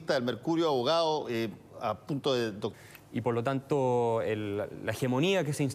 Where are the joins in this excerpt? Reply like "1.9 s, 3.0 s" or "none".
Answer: none